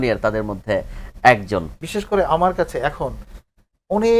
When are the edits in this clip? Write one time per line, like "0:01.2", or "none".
0:01.9

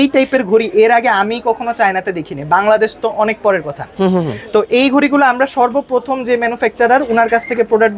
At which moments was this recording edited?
none

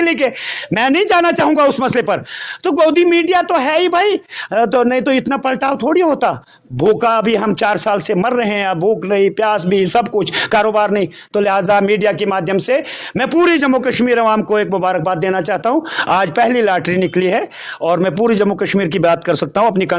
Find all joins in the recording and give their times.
none

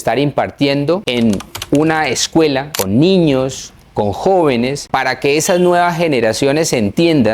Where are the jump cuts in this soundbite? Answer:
0:01.1
0:02.7
0:04.8

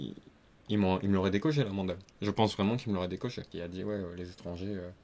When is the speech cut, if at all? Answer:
0:03.5

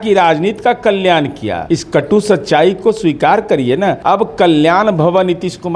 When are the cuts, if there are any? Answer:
0:01.5
0:04.0

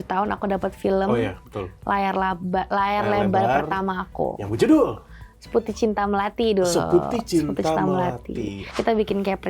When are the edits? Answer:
0:08.6

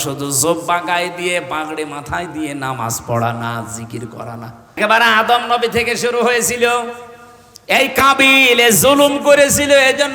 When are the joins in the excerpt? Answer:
0:04.8

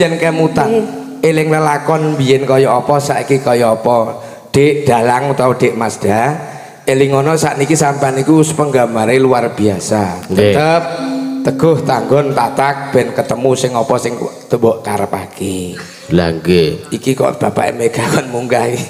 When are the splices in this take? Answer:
none

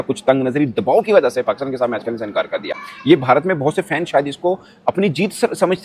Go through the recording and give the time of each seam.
none

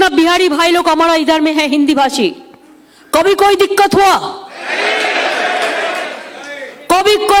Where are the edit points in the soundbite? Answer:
none

